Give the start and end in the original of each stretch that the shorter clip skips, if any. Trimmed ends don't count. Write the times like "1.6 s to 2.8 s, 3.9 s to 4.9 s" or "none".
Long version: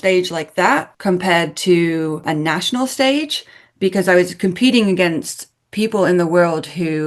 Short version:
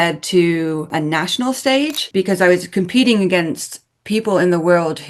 3.3 s to 3.7 s